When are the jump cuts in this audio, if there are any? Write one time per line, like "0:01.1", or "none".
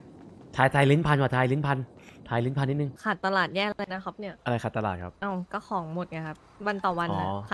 0:03.0
0:04.3
0:05.1
0:06.4